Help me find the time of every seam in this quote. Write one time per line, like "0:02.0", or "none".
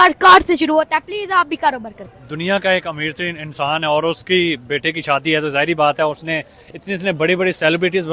0:01.9